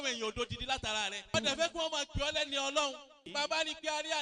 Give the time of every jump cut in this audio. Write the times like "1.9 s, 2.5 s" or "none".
1.3 s, 3.3 s